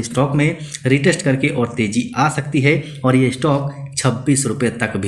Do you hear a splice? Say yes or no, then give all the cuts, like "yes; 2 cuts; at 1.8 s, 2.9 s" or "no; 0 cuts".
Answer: no; 0 cuts